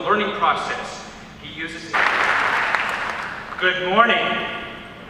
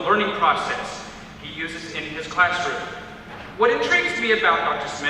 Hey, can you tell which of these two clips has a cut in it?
second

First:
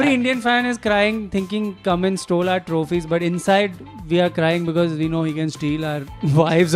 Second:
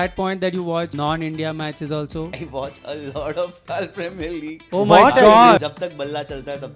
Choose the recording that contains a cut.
second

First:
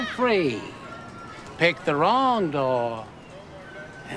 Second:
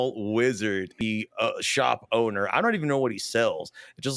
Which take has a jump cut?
second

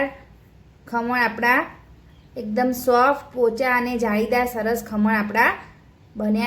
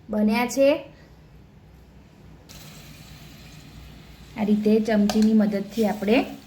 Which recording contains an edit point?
second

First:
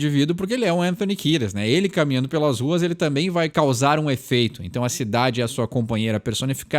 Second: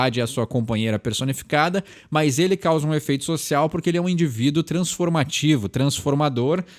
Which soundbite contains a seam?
first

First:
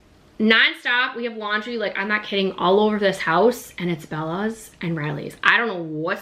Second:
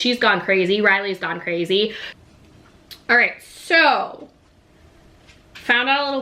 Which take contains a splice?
second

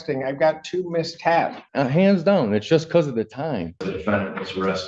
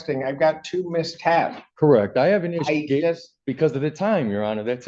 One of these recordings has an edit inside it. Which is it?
first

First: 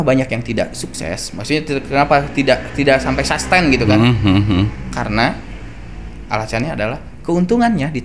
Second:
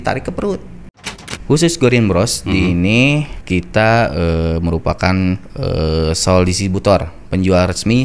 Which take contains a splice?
second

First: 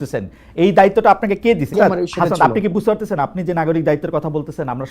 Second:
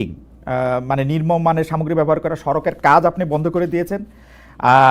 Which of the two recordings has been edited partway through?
first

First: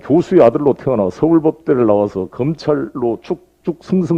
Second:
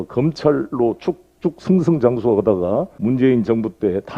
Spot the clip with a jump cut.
second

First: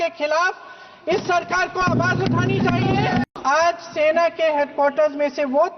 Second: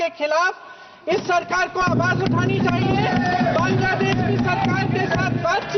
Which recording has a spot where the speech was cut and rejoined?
first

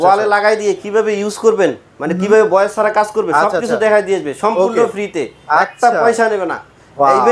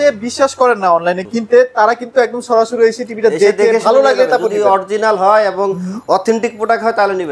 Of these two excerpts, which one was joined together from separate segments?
second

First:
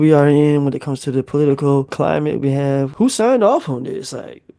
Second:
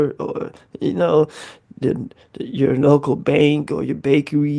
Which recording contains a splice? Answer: first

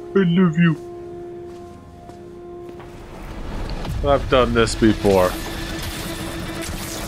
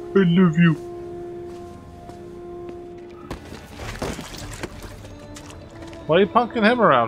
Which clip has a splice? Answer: first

